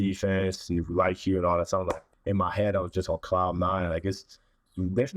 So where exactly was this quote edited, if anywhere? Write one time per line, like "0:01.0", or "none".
0:02.1